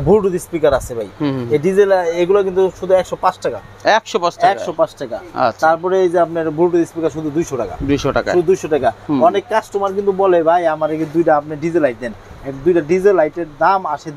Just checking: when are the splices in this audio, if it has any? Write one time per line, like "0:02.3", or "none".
none